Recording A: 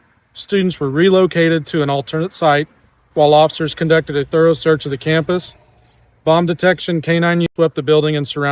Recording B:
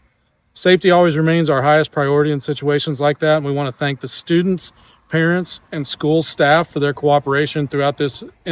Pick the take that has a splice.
A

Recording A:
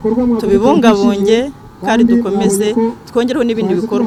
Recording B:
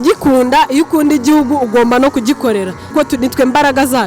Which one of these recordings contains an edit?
B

